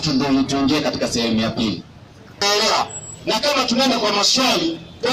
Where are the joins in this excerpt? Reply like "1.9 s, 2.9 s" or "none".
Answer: 2.4 s